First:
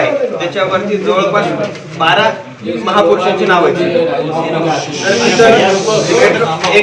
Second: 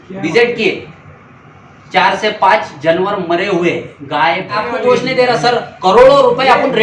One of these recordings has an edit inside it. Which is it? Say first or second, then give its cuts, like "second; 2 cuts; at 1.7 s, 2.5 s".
second; 1 cut; at 4.6 s